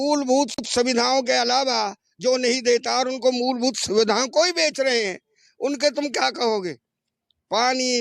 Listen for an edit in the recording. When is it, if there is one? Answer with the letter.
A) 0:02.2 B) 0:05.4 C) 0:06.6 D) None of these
D